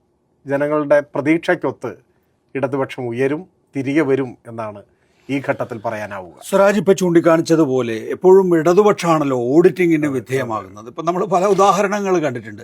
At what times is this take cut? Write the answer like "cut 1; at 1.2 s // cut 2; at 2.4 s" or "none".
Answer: none